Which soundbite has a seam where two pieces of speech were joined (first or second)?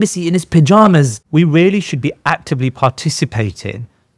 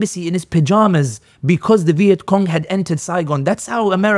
first